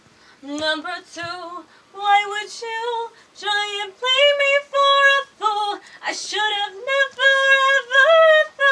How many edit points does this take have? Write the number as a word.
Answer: zero